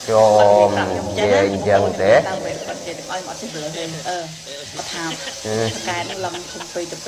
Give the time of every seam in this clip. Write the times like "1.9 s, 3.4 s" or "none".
none